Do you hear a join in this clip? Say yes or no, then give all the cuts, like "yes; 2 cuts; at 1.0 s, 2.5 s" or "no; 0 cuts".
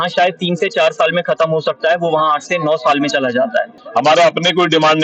yes; 1 cut; at 3.8 s